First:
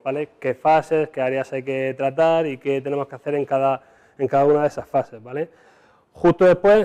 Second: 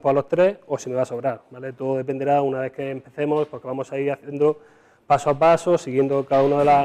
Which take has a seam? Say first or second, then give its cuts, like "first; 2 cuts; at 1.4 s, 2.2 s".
second; 1 cut; at 2.0 s